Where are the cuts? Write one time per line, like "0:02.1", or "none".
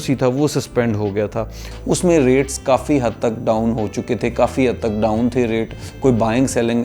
0:01.7

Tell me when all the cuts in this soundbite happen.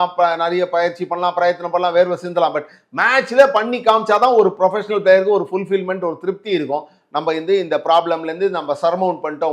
none

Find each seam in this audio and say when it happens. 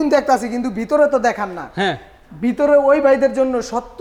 none

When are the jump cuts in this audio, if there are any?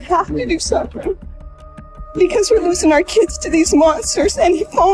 none

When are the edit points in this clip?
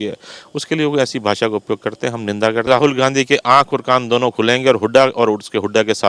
0:02.7

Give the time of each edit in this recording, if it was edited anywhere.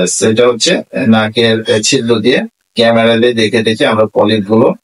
none

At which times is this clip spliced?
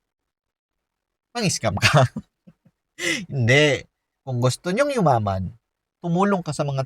0:05.9

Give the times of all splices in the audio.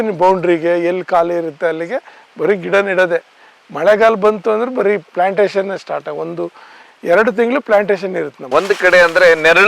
0:08.4

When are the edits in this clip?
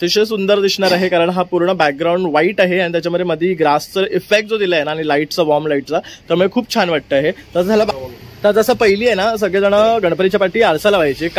0:07.9

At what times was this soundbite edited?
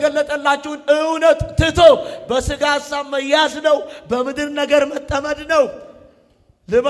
none

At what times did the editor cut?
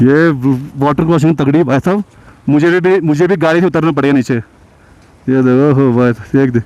none

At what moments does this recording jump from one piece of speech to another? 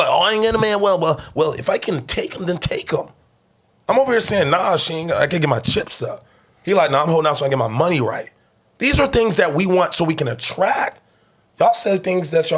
none

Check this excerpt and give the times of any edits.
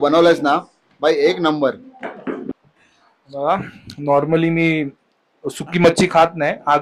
0:02.5

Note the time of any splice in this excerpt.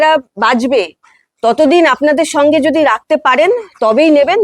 none

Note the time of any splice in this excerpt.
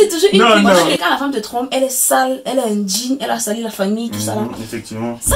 0:00.9

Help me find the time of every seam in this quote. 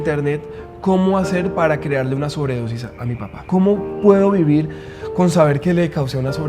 0:03.4

